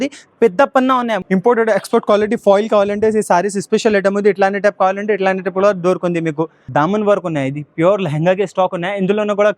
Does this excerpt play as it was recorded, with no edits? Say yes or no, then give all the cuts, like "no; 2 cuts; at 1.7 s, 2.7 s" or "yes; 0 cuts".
no; 2 cuts; at 1.2 s, 6.7 s